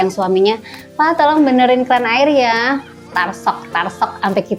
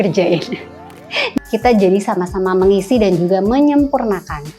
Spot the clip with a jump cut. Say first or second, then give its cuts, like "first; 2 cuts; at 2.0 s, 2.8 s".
second; 1 cut; at 1.3 s